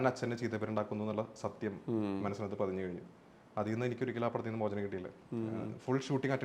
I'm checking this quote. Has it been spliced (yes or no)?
no